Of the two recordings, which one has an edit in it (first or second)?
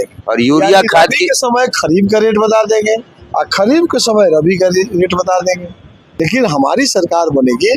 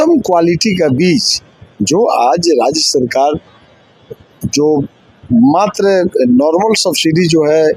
first